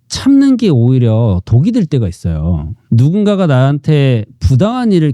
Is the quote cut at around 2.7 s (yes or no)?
yes